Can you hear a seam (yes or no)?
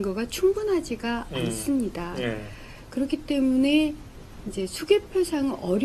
no